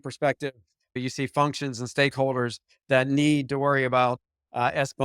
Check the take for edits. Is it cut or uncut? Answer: cut